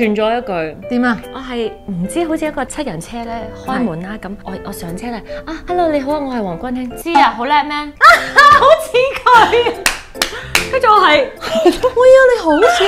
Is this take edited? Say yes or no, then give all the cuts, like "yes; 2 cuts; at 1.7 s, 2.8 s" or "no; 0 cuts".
no; 0 cuts